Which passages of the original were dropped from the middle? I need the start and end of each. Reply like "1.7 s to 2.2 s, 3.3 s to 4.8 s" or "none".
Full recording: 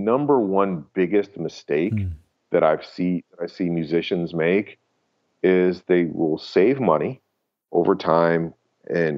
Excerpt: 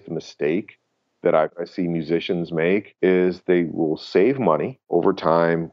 2.9 s to 3.4 s, 4.7 s to 5.3 s, 7.2 s to 7.6 s